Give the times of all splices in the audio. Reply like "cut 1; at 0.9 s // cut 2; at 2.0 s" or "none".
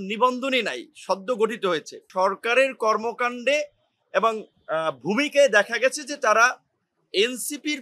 cut 1; at 2.0 s